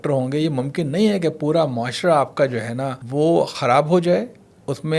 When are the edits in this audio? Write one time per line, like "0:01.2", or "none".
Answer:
0:03.0